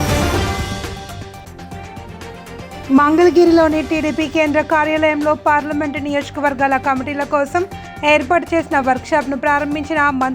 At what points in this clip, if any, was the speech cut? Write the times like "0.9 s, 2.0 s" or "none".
1.4 s, 2.8 s